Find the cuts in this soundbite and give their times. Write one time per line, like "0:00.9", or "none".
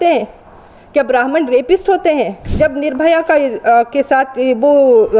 0:02.4